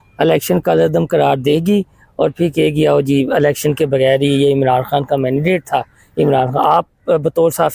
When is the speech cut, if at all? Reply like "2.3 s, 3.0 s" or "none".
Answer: none